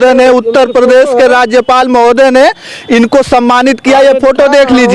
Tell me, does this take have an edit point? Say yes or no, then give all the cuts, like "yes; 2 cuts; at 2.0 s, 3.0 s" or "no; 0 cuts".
no; 0 cuts